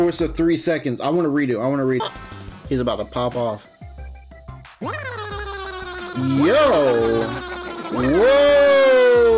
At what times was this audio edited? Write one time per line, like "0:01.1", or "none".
0:02.0